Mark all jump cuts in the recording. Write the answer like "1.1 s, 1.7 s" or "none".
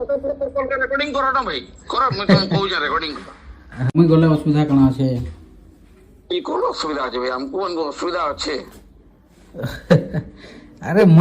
3.9 s